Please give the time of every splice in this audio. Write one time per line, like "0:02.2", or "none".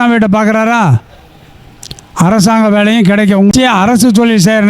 0:03.5